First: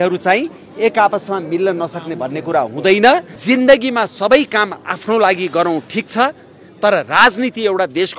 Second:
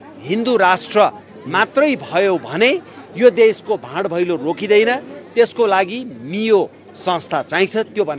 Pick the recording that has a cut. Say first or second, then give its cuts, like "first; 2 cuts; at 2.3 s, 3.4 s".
first; 1 cut; at 3.3 s